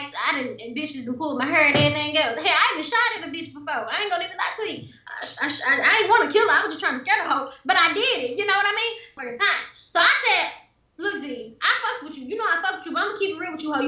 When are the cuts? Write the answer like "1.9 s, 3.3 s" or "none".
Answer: 9.2 s